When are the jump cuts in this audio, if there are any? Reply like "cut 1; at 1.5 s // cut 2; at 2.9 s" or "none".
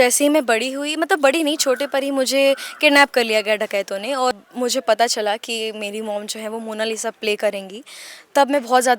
cut 1; at 4.4 s